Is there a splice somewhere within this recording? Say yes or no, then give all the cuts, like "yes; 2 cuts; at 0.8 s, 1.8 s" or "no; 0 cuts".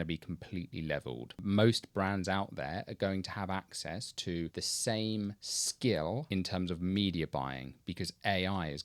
no; 0 cuts